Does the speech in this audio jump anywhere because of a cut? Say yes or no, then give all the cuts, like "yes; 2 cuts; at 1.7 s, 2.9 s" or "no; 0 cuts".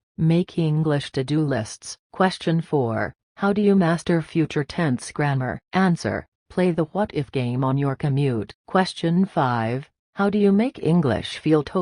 yes; 2 cuts; at 2.0 s, 8.5 s